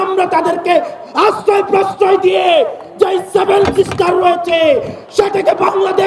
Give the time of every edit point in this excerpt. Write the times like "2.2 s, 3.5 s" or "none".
none